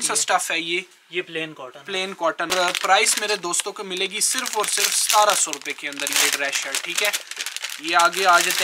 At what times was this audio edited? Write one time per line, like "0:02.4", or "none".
none